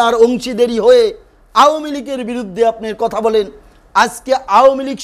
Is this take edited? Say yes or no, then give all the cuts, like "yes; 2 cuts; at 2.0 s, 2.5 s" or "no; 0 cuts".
no; 0 cuts